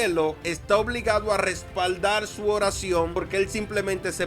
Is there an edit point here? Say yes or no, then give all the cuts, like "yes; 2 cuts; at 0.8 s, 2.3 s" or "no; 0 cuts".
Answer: yes; 1 cut; at 3.2 s